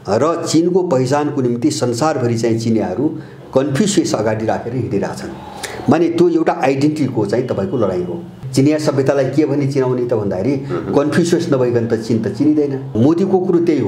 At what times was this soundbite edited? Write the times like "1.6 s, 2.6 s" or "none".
8.3 s, 13.0 s